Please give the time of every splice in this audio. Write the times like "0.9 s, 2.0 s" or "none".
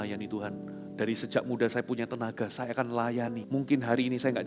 3.4 s